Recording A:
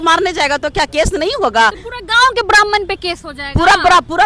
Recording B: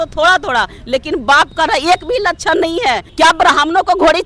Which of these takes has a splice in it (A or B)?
B